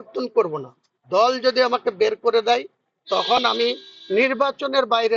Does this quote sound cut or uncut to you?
uncut